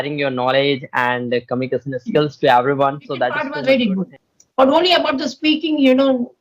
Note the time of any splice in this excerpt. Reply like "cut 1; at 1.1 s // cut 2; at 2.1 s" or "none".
cut 1; at 3.5 s